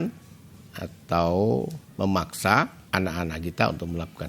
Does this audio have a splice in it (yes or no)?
yes